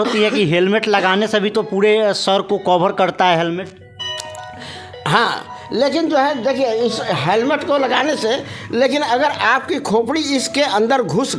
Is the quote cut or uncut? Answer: uncut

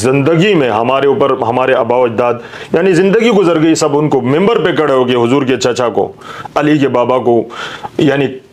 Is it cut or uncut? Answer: uncut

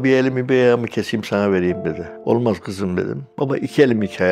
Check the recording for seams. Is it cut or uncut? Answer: cut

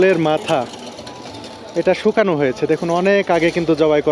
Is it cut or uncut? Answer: uncut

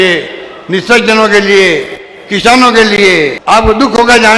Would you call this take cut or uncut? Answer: cut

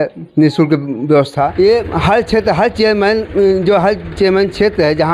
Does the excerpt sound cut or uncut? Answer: cut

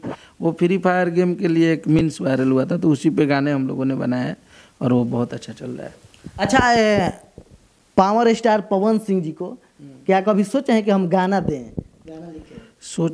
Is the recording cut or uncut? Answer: uncut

